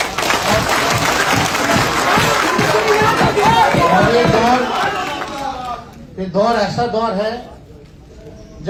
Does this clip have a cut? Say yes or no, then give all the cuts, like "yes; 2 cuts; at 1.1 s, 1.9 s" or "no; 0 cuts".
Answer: no; 0 cuts